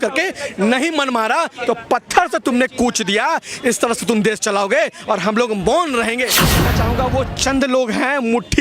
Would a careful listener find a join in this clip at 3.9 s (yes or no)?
no